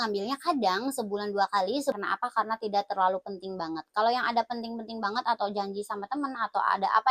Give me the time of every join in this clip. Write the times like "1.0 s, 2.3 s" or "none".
2.0 s